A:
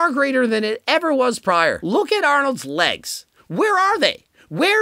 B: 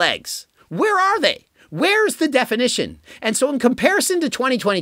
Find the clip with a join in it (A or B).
A